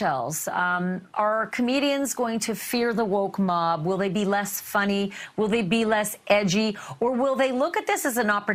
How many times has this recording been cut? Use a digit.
0